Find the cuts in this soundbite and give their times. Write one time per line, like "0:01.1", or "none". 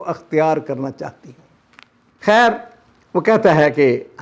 none